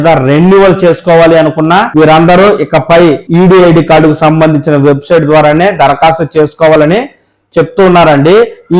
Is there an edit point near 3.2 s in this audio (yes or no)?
yes